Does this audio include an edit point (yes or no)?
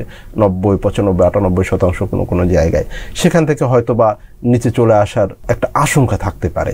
yes